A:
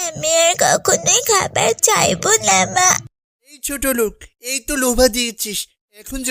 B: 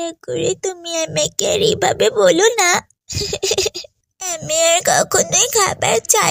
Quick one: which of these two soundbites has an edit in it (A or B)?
A